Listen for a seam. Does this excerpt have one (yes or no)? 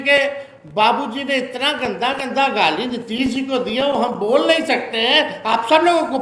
no